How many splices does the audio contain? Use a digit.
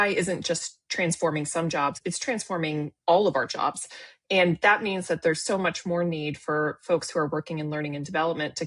1